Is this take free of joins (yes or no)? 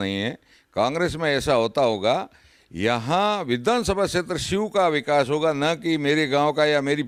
yes